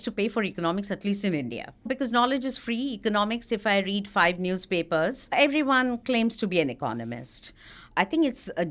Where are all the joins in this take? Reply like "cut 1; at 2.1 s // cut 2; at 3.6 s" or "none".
cut 1; at 1.9 s // cut 2; at 5.3 s // cut 3; at 7.8 s